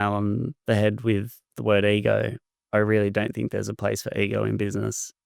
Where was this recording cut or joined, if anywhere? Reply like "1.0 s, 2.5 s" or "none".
2.5 s